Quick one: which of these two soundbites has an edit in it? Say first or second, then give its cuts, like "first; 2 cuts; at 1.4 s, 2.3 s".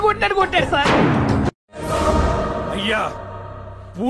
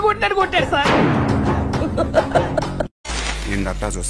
first; 1 cut; at 1.5 s